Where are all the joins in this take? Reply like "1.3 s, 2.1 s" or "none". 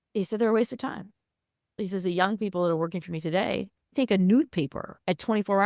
1.8 s, 3.9 s